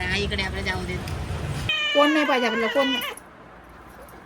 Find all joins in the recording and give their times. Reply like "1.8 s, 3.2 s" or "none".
1.7 s

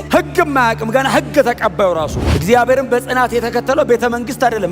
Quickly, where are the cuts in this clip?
2.3 s

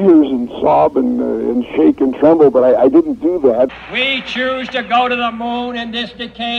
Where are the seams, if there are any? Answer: 3.7 s

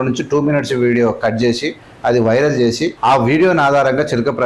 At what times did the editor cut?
2.9 s

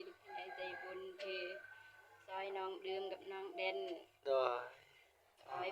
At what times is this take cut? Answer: none

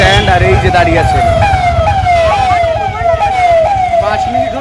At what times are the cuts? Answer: none

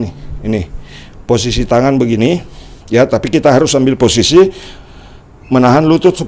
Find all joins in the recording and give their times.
none

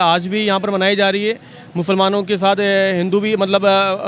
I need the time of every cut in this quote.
none

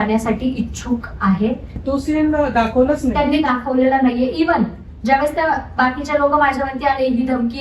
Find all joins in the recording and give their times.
1.7 s

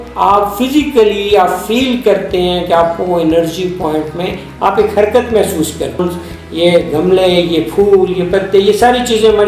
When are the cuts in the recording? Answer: 6.0 s

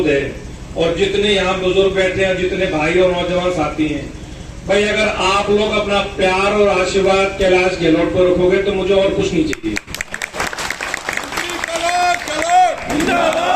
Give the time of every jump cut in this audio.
none

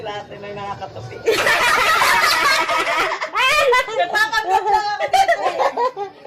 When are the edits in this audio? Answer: none

